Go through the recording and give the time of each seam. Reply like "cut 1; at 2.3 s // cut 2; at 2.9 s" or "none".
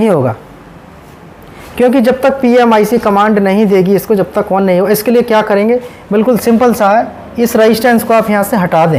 none